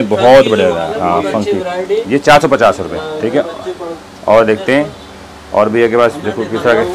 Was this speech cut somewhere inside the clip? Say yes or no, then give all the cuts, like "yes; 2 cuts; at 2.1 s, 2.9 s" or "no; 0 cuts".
no; 0 cuts